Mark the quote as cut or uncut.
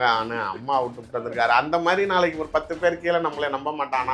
uncut